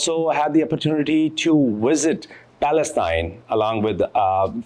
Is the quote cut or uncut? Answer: uncut